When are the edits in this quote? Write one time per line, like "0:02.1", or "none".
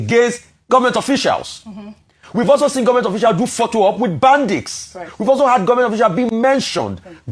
none